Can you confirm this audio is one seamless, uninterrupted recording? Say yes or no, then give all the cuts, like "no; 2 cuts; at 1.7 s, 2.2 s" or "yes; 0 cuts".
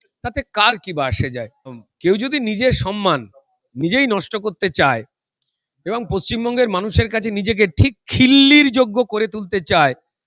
no; 1 cut; at 1.8 s